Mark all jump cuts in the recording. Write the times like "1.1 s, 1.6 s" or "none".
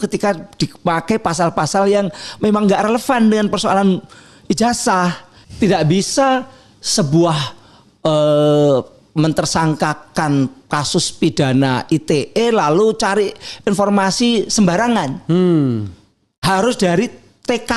5.3 s